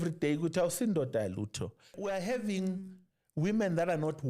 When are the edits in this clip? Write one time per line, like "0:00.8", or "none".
0:01.9